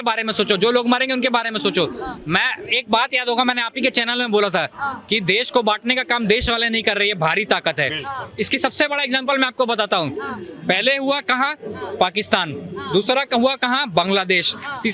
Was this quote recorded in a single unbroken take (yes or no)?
yes